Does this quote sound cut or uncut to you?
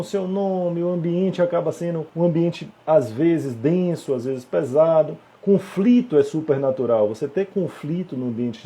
cut